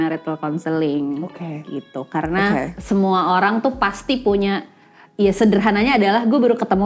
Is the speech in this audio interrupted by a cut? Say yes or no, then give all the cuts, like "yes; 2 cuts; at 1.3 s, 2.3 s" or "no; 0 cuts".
yes; 1 cut; at 2.8 s